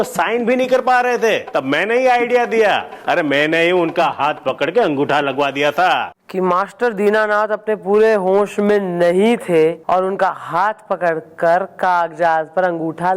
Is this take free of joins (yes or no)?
no